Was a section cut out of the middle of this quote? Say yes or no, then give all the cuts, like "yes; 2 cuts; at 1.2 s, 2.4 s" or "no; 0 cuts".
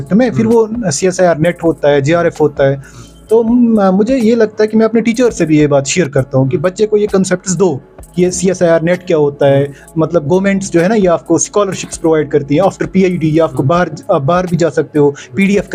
no; 0 cuts